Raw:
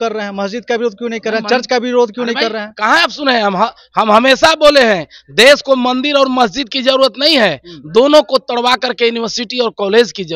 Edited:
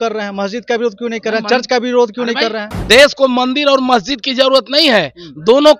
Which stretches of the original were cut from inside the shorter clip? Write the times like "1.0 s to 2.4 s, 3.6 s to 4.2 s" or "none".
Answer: 2.7 s to 5.2 s